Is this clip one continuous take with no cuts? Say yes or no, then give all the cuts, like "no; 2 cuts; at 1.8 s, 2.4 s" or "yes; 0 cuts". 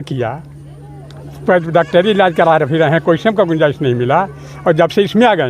yes; 0 cuts